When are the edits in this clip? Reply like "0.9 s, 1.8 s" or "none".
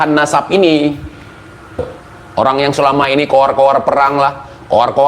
1.8 s